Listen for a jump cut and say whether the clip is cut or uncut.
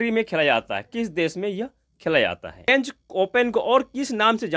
cut